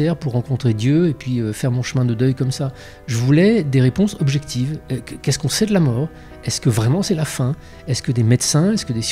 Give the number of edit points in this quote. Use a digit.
0